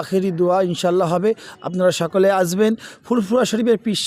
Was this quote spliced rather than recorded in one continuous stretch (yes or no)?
no